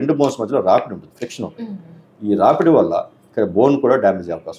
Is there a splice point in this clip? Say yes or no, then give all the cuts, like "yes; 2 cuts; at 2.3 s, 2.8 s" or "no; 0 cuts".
no; 0 cuts